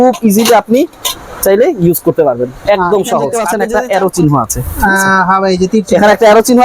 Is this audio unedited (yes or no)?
no